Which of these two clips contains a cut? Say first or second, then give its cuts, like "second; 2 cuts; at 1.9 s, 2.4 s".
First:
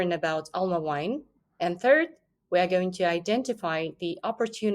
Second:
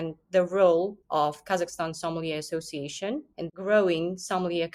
first; 1 cut; at 1.3 s